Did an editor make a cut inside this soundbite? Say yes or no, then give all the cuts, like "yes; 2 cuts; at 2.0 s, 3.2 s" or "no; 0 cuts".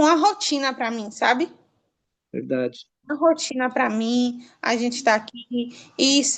no; 0 cuts